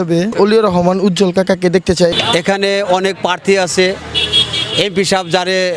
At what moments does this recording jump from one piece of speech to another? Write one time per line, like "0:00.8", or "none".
0:02.1

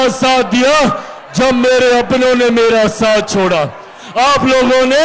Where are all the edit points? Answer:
none

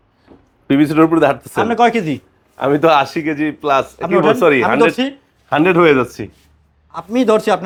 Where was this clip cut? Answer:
none

